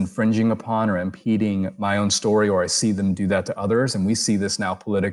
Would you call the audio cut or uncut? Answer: uncut